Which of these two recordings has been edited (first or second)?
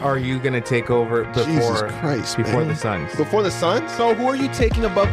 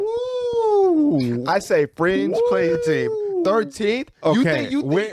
first